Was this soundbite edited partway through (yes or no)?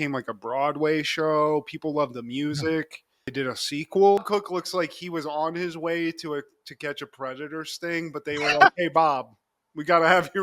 yes